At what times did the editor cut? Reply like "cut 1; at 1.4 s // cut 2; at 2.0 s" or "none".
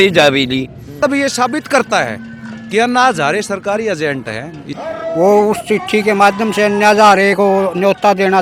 cut 1; at 1.0 s // cut 2; at 4.6 s